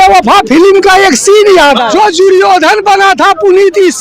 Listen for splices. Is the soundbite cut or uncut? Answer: cut